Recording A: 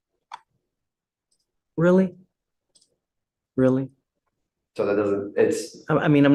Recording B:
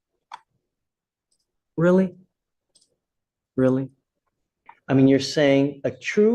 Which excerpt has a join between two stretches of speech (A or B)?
B